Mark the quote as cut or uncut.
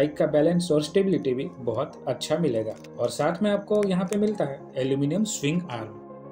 uncut